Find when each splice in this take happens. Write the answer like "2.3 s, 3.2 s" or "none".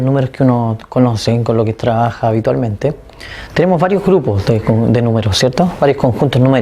1.2 s